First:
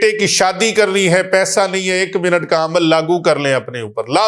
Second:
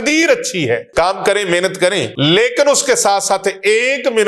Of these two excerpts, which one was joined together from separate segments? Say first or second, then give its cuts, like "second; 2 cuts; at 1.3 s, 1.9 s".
second; 2 cuts; at 0.9 s, 2.1 s